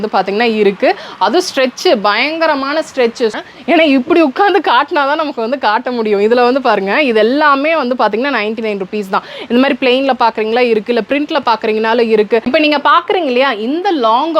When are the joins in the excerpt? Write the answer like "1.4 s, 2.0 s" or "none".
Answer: 3.4 s, 12.5 s